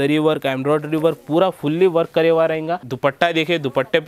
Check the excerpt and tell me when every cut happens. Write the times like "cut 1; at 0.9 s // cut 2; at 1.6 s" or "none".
cut 1; at 2.9 s